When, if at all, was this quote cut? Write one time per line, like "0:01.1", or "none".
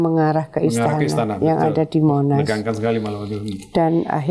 none